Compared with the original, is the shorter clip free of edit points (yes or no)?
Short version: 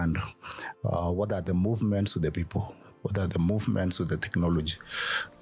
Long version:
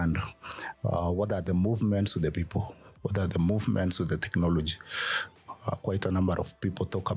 yes